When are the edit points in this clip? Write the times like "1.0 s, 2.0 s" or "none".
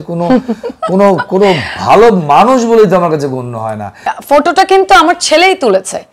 4.1 s